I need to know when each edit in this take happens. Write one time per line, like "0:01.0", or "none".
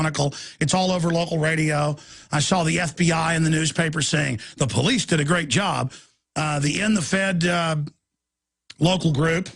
0:01.1